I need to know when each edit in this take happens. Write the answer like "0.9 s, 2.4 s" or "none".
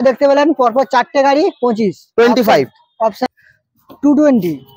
3.3 s